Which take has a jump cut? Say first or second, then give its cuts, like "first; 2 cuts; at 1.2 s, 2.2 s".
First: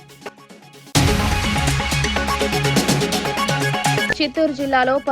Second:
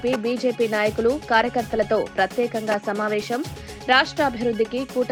first; 2 cuts; at 0.9 s, 4.0 s